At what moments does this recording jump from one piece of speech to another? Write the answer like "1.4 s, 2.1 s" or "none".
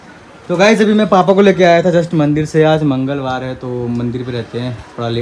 none